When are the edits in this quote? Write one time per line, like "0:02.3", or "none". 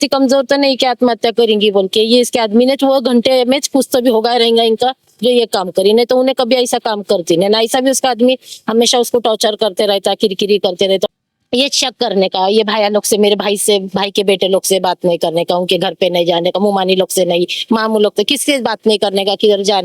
0:11.1